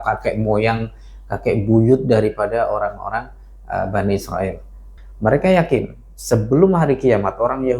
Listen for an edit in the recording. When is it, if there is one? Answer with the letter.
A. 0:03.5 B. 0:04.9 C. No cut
B